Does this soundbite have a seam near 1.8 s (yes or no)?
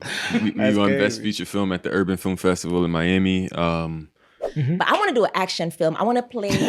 no